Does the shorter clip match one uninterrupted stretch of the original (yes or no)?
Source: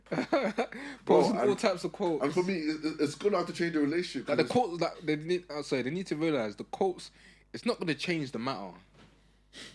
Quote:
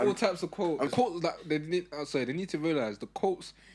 no